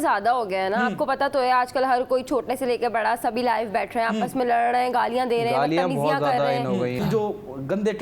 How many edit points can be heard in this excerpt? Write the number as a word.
one